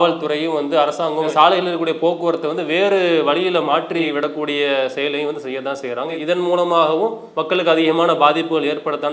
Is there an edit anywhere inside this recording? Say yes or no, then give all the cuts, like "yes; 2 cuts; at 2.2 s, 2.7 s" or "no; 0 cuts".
yes; 1 cut; at 7.3 s